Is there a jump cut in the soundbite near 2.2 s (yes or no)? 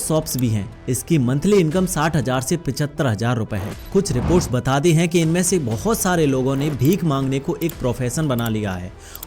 no